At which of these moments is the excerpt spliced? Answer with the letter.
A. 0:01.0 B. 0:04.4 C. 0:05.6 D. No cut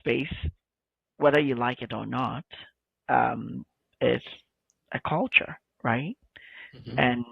D